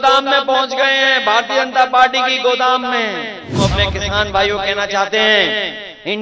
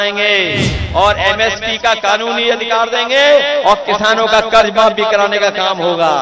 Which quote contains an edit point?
first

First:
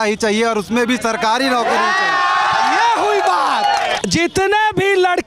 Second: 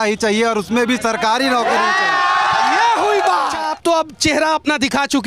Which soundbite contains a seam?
second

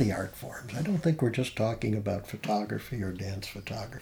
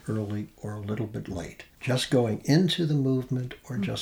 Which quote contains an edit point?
second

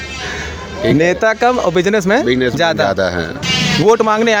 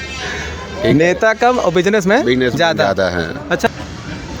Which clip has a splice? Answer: second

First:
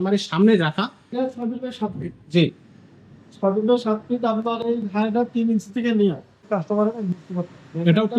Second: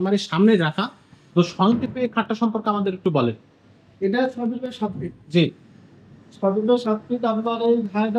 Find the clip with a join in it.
first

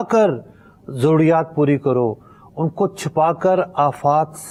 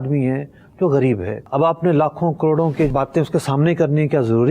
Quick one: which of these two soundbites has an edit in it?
second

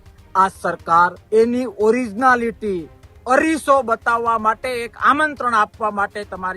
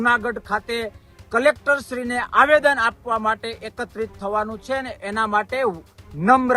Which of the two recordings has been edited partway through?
first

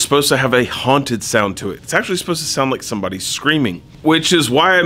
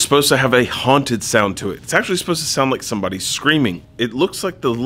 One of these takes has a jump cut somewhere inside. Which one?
second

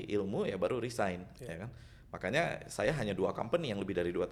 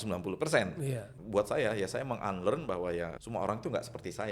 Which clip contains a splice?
second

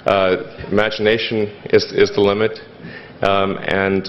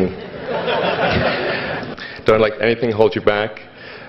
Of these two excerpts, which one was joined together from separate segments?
second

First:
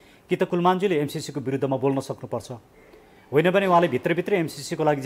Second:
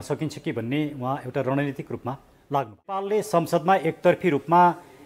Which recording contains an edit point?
second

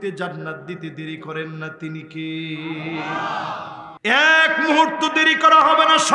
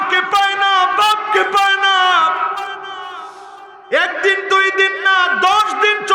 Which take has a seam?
first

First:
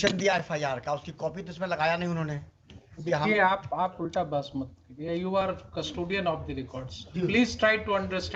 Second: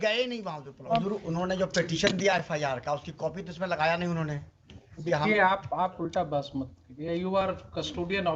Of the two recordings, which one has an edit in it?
second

